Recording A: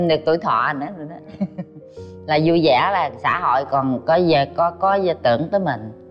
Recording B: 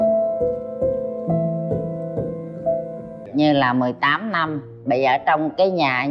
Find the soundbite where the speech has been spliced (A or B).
B